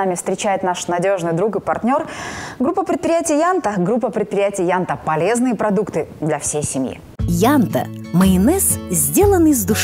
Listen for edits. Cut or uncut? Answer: uncut